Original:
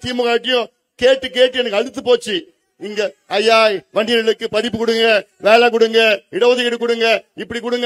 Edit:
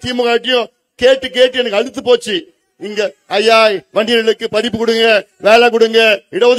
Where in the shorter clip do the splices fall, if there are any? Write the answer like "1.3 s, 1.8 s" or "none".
none